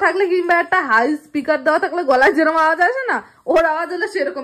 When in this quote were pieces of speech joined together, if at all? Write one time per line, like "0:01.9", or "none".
none